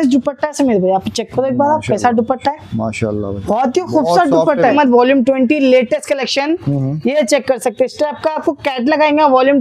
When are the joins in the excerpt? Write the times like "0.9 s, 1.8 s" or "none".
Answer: 4.7 s